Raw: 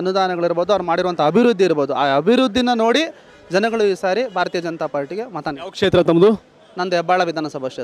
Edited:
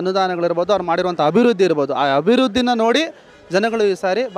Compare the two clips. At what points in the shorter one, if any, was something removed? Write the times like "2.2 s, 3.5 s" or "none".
none